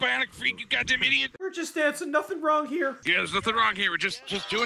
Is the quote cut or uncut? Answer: cut